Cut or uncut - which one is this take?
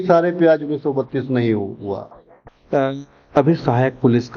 cut